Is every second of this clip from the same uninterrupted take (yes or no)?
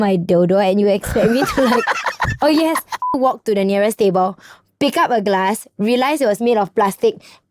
no